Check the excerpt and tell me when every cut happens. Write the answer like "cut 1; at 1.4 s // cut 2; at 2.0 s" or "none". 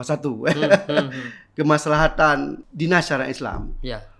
cut 1; at 2.6 s